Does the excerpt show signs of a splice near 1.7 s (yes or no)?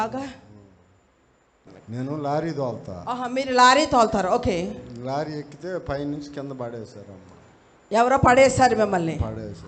yes